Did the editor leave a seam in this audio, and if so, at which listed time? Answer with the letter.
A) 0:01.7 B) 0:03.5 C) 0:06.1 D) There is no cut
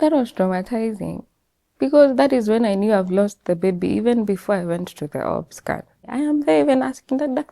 C